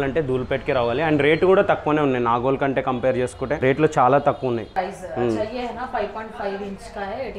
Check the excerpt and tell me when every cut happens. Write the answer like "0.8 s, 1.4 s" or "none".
4.7 s